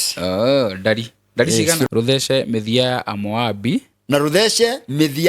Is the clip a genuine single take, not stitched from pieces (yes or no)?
no